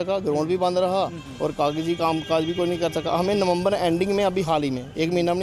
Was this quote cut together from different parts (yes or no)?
no